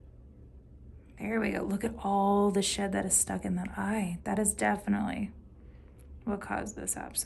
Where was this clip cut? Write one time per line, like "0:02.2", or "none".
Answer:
none